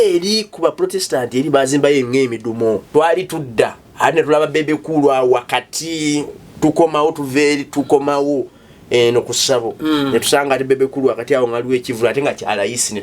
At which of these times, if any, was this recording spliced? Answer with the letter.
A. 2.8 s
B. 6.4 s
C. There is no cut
A